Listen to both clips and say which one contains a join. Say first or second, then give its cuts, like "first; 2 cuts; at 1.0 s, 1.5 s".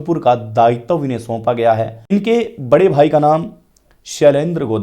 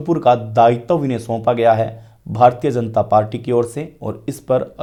first; 1 cut; at 2.1 s